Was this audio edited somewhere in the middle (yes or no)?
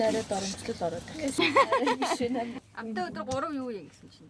yes